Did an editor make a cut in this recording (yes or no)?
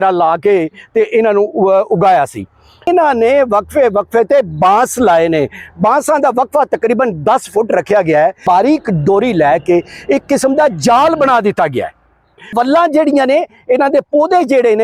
yes